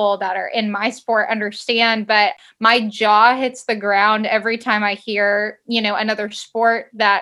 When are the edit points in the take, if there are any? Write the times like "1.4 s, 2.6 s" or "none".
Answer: 2.4 s